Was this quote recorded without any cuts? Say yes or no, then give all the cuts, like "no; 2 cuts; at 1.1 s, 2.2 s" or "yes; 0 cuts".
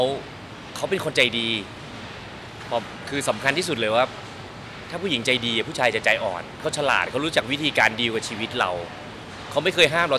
no; 1 cut; at 6.6 s